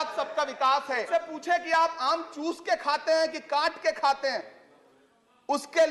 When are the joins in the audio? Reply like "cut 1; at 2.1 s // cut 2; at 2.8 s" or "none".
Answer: cut 1; at 1.1 s